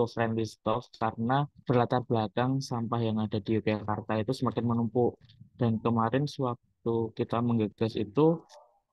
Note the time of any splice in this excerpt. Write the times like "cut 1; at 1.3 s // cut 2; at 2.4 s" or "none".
cut 1; at 1.6 s